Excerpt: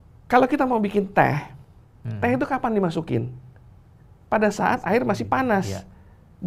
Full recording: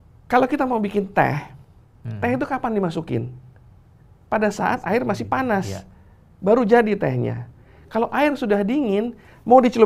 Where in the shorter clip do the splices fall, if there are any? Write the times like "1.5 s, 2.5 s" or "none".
none